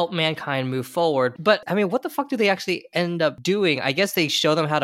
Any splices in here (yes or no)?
yes